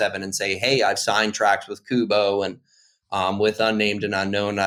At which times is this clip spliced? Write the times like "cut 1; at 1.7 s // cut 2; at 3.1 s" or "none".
none